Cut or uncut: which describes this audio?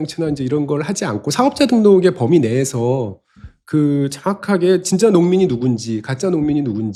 uncut